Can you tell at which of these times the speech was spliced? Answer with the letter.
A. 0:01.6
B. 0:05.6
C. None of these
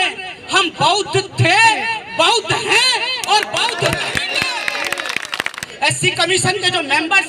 B